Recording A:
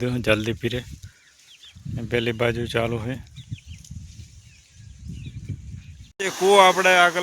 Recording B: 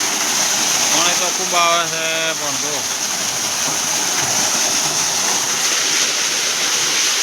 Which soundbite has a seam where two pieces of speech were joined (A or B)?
A